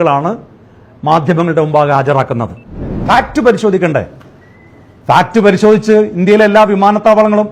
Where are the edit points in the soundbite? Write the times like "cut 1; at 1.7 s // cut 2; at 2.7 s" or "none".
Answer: cut 1; at 3.0 s